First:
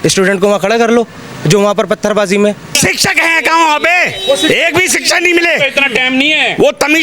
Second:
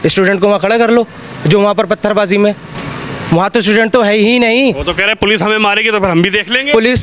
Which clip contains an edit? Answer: first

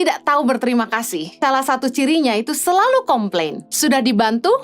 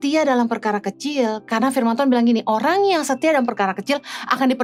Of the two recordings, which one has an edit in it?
first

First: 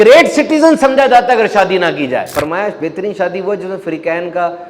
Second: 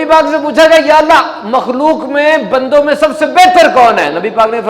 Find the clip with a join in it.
first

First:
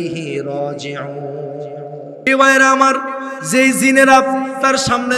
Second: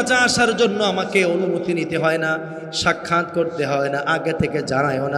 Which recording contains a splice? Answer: first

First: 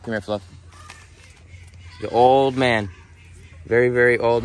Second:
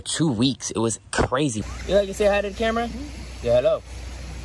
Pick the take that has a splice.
second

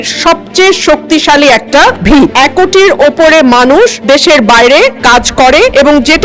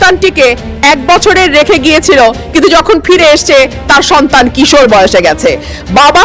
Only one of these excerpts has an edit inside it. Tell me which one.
first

